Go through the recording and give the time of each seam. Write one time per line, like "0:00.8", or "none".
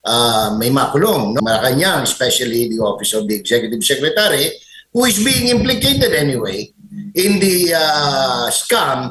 0:01.4